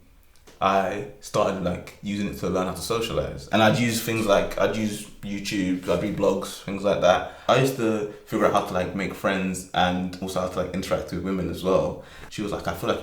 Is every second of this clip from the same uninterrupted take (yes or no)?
no